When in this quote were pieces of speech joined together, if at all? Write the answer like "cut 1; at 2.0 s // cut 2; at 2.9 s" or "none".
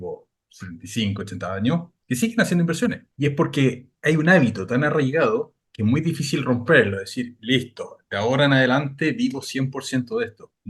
cut 1; at 1.9 s // cut 2; at 3.1 s // cut 3; at 3.9 s // cut 4; at 5.6 s